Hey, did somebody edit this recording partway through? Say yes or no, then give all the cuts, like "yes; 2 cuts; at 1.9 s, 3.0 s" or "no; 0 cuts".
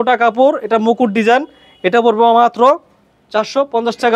no; 0 cuts